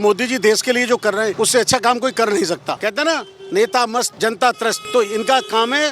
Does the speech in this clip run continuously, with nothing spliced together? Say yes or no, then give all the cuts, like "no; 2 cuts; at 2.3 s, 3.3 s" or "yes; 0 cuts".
no; 4 cuts; at 1.3 s, 2.7 s, 4.1 s, 4.8 s